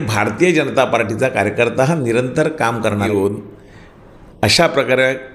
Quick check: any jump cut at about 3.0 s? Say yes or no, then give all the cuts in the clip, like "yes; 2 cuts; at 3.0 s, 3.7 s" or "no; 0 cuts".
yes; 1 cut; at 3.0 s